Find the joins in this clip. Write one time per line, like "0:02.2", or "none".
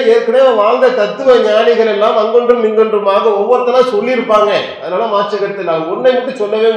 none